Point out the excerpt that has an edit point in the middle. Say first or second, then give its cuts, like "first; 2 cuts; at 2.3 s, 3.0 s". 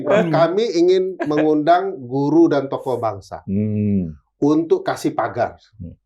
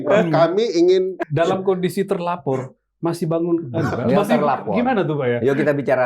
second; 1 cut; at 1.2 s